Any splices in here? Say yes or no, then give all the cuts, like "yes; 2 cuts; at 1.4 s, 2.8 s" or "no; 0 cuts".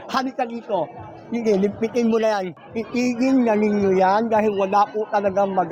yes; 1 cut; at 2.5 s